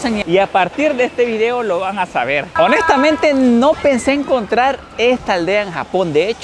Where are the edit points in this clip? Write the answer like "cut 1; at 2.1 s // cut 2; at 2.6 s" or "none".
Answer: cut 1; at 2.5 s